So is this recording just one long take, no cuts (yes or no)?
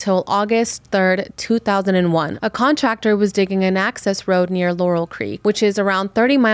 no